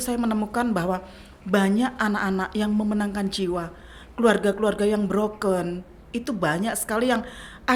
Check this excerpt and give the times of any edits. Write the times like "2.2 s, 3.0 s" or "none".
none